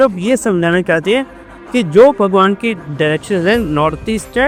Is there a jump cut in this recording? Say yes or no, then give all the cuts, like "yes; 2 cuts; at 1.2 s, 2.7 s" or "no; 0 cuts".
no; 0 cuts